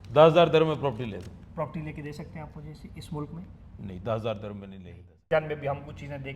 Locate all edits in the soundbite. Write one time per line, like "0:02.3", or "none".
0:05.3